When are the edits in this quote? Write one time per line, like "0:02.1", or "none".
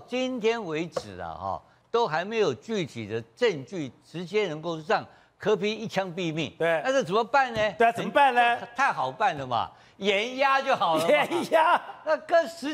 none